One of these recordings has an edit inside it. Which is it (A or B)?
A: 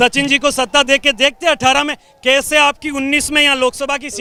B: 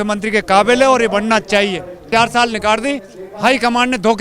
B